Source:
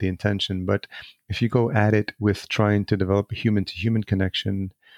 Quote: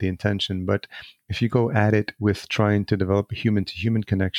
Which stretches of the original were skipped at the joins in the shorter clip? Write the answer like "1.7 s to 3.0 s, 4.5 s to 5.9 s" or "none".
none